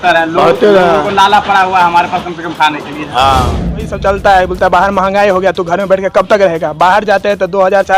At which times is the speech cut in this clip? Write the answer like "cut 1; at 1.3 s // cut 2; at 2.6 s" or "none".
cut 1; at 3.9 s